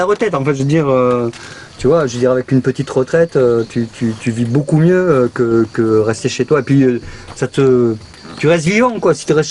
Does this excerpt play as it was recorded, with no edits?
yes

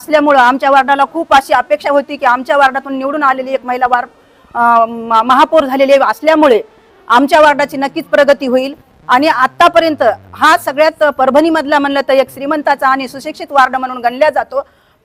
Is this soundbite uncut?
yes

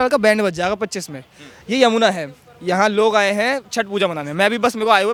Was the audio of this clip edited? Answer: no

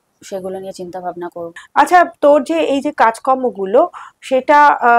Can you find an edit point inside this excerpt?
no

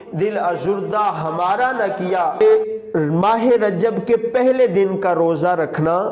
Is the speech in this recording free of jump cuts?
no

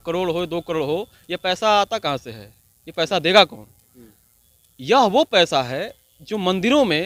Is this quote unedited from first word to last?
yes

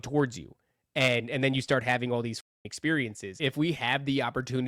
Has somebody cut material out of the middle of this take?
yes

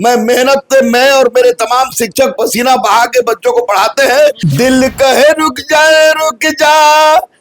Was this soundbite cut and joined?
yes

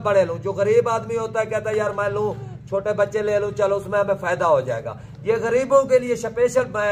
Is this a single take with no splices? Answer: yes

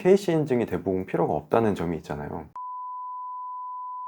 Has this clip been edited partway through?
no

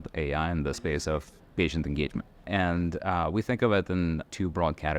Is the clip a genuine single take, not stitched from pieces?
no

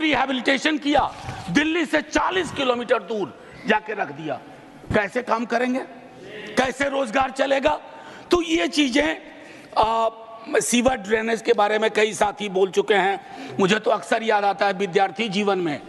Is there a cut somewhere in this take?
no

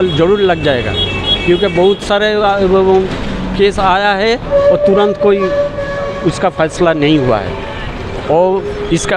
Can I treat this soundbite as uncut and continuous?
yes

